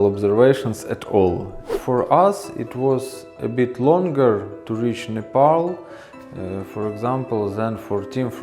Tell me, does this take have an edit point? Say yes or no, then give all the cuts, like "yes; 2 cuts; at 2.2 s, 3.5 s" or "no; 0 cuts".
yes; 1 cut; at 1.7 s